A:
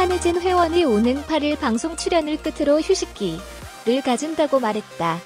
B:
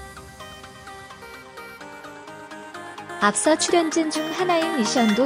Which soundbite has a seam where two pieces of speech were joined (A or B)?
B